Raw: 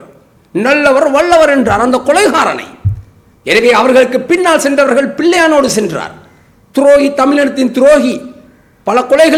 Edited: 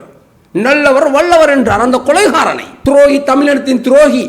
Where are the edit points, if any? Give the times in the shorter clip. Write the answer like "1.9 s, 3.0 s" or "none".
2.6 s

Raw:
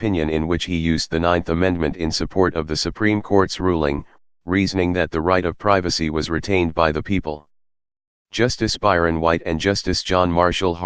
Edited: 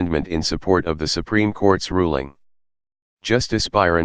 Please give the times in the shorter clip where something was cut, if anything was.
2.1 s

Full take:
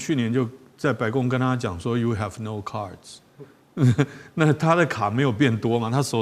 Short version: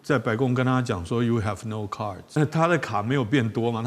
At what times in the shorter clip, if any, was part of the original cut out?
2.4 s

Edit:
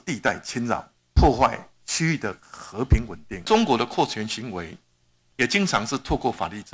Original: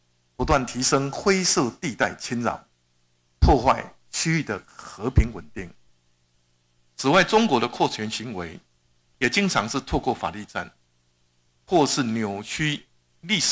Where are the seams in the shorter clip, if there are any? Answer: 1.0 s, 3.4 s

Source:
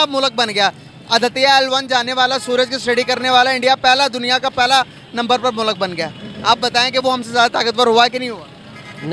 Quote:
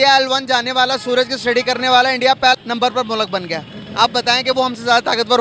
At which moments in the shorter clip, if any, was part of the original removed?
2.6 s

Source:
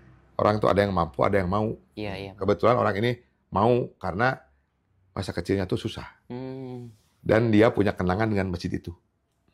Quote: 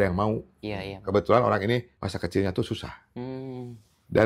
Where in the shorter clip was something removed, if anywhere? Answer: 2.0 s

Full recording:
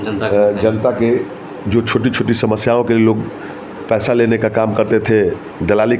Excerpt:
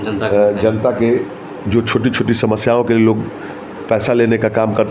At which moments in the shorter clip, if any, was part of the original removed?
none

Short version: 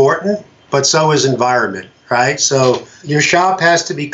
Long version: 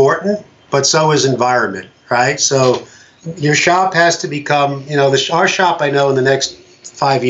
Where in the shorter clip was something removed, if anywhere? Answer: 2.9 s

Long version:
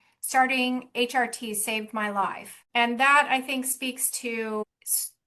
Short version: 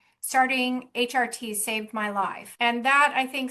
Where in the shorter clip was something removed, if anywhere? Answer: 2.4 s

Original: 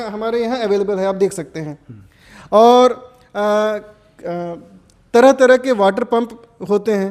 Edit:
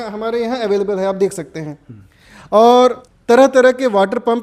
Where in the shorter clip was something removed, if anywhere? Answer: 3.1 s

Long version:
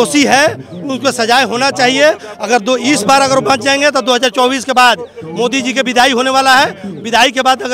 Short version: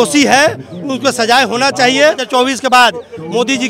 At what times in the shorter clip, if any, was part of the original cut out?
2.2 s

